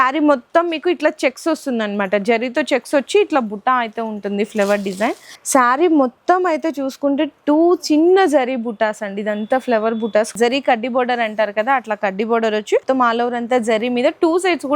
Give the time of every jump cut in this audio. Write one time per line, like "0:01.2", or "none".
0:05.3
0:10.3
0:12.8